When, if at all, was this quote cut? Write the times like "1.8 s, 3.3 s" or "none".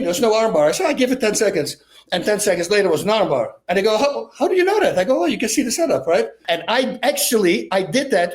6.4 s

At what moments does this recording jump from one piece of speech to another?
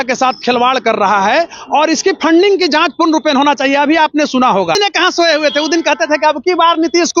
4.8 s

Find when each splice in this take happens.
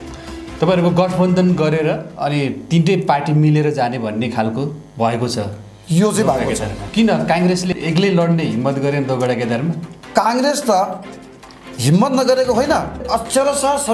6.8 s, 13.0 s

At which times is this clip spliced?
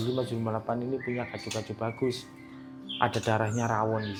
none

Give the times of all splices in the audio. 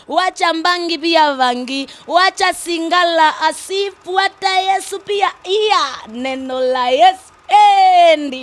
none

